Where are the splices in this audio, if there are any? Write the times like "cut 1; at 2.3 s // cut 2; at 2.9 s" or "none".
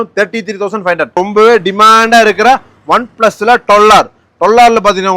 cut 1; at 1.2 s